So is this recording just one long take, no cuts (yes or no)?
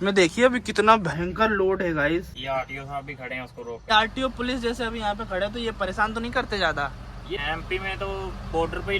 no